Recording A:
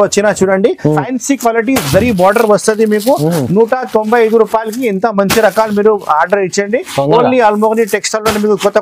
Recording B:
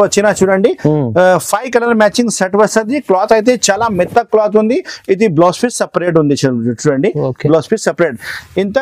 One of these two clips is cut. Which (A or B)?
A